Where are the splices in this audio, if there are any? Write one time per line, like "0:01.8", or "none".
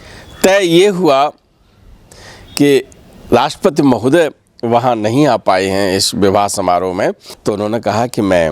0:07.3